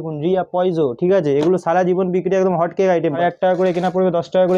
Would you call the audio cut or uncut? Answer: cut